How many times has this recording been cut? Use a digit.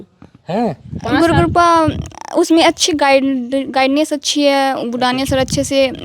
1